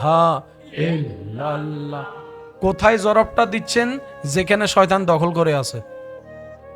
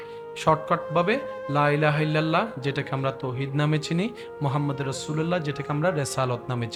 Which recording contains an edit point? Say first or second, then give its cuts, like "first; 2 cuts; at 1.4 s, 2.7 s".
first; 1 cut; at 5.8 s